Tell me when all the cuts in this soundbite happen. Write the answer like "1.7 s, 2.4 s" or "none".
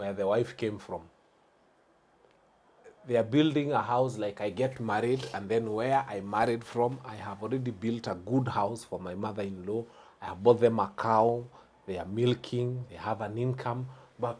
none